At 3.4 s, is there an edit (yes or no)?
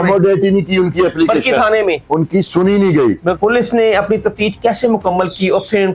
yes